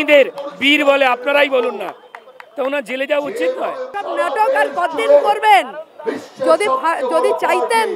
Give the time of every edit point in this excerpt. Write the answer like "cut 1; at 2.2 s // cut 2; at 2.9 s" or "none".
cut 1; at 3.9 s

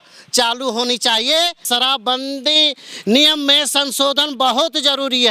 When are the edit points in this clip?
cut 1; at 1.6 s

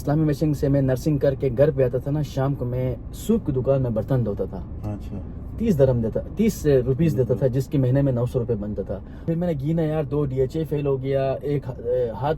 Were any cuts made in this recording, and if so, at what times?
cut 1; at 9.2 s

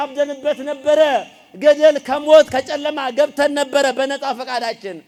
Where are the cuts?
none

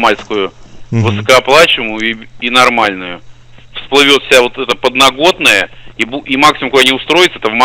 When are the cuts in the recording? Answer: none

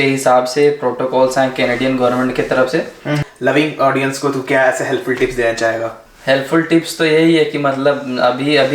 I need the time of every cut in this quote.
cut 1; at 3.2 s // cut 2; at 6.1 s

